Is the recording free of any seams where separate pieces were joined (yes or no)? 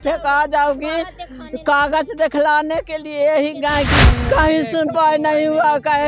no